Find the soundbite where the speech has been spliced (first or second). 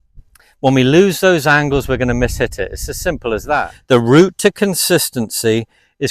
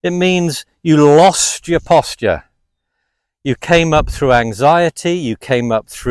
first